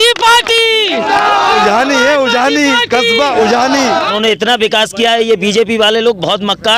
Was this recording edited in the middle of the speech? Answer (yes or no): yes